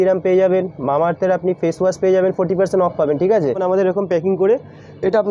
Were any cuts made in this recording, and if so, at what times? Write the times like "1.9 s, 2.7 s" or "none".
3.6 s